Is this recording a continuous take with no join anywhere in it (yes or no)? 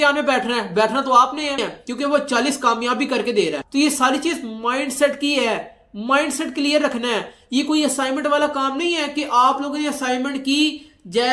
no